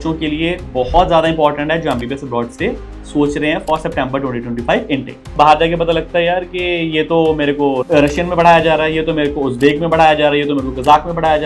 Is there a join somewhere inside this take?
yes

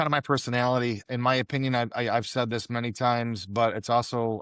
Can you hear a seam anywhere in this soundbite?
yes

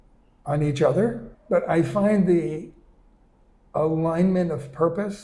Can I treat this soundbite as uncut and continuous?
no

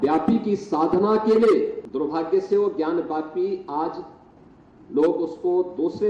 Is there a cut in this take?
yes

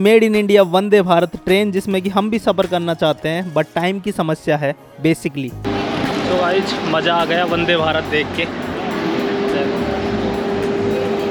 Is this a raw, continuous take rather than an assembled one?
yes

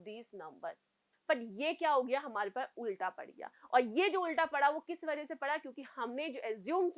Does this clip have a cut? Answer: yes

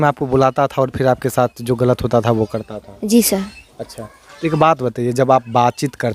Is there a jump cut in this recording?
no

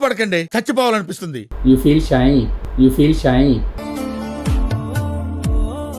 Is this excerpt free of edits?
no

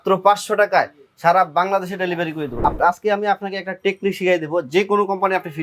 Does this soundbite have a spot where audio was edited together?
yes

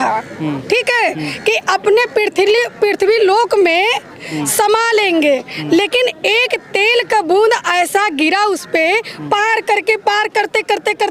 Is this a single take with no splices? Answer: yes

